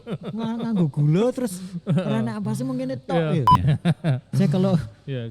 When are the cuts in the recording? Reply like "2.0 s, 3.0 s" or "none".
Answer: 3.5 s